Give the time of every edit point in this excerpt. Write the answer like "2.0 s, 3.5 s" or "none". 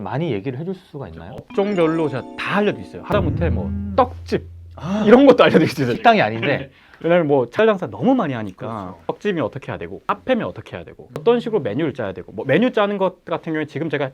8.9 s, 10.0 s, 11.2 s